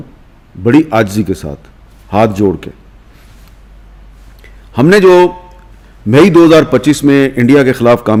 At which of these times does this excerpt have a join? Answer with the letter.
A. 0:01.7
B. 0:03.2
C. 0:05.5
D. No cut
D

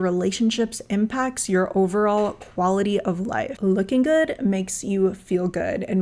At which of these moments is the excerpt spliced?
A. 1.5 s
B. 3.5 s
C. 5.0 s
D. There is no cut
B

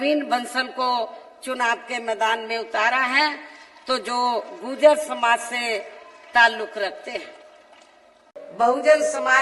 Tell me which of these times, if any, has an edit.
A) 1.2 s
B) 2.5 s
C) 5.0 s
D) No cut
D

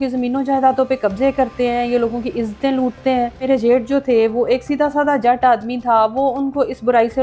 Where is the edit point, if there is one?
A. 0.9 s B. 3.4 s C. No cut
B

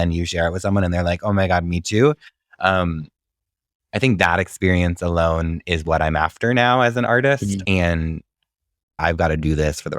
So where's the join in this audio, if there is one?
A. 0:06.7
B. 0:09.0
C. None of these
B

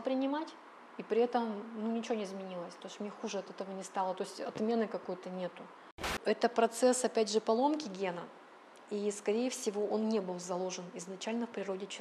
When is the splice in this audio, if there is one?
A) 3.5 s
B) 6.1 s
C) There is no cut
B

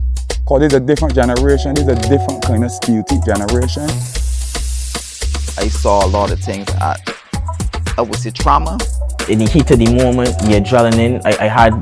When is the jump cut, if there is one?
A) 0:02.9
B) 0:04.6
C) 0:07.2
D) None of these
D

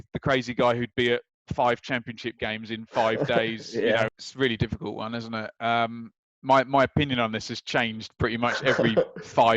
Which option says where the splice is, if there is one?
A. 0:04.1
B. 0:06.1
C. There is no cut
A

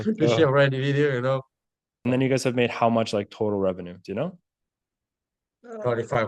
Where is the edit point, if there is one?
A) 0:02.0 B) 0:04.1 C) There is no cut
A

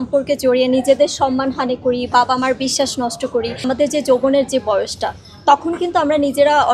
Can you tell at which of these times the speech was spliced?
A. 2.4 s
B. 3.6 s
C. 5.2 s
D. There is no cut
B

